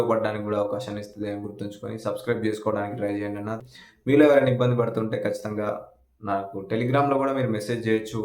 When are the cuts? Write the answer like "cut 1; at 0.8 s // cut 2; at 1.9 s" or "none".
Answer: cut 1; at 3.6 s